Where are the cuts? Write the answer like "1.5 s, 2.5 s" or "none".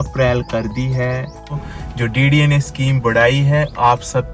1.6 s